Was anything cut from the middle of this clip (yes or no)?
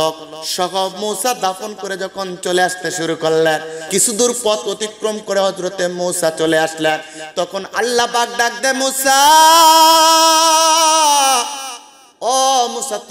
yes